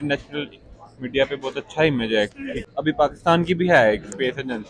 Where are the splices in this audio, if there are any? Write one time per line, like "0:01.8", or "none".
0:02.6